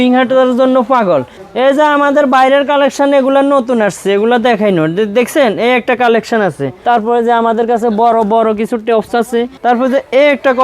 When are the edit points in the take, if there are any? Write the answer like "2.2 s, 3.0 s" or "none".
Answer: 1.4 s, 6.7 s, 9.5 s